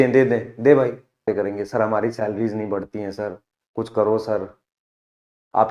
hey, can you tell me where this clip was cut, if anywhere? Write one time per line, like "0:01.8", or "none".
0:01.2